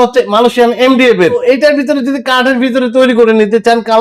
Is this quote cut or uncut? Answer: cut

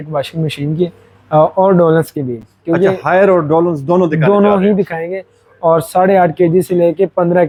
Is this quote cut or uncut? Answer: uncut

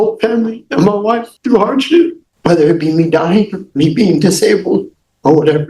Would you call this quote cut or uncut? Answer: cut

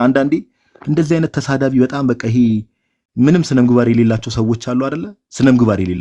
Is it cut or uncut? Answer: uncut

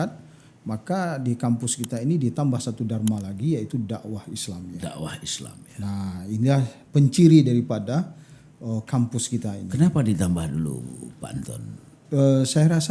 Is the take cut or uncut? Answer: uncut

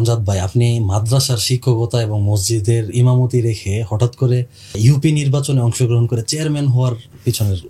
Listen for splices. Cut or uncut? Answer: cut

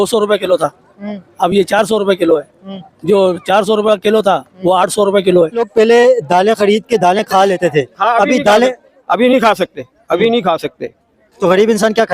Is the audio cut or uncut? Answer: cut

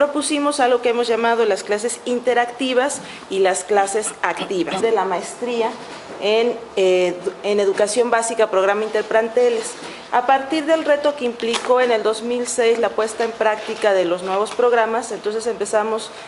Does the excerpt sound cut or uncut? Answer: uncut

